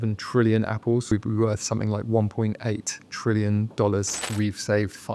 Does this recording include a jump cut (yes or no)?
yes